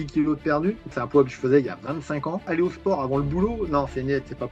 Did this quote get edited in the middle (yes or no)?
yes